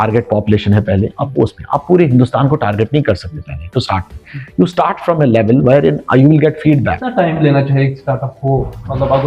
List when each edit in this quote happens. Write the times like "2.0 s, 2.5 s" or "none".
7.1 s